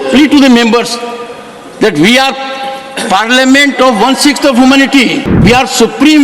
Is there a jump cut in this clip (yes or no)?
yes